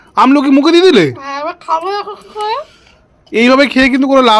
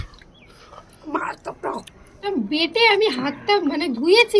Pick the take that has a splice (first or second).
second